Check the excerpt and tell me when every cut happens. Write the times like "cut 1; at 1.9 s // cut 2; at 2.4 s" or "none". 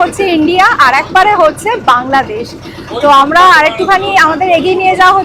none